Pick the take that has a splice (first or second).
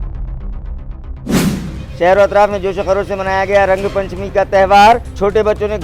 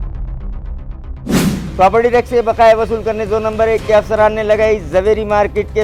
first